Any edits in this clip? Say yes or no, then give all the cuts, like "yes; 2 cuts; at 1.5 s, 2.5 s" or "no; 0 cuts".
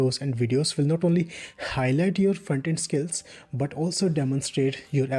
no; 0 cuts